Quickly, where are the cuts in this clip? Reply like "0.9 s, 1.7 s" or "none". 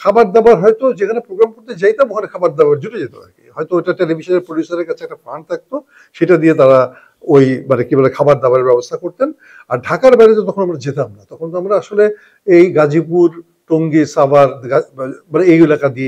none